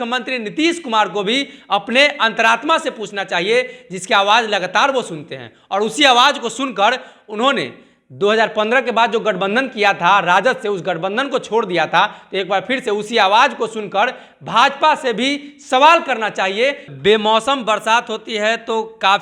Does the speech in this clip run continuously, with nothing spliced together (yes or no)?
no